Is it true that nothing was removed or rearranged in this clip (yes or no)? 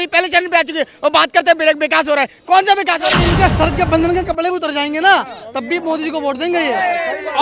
no